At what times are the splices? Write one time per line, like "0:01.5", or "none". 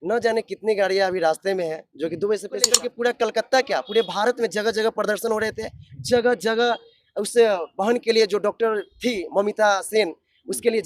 0:02.9